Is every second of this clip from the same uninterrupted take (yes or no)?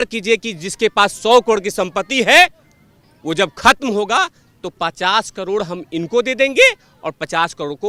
yes